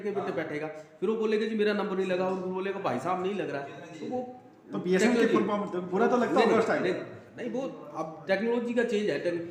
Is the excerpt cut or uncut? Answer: uncut